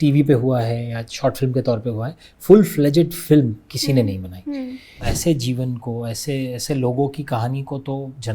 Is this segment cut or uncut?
cut